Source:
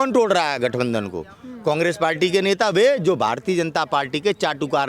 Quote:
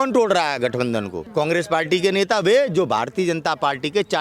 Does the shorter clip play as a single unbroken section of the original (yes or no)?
no